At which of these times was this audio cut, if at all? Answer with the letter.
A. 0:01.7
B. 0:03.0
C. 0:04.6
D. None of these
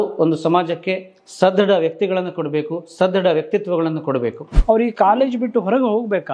C